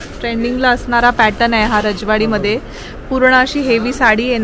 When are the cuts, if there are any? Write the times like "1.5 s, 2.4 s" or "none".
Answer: none

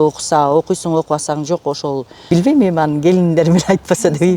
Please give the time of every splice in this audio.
2.1 s

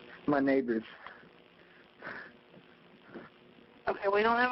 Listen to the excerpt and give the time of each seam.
none

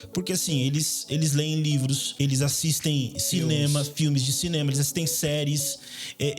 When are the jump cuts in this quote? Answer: 2.1 s

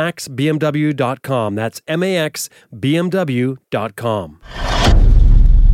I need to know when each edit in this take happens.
none

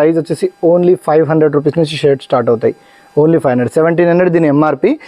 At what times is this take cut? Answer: none

